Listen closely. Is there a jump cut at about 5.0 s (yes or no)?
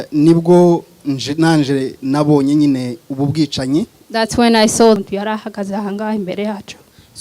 yes